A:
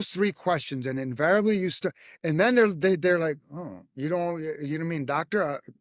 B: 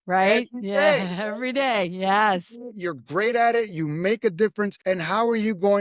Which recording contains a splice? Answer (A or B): B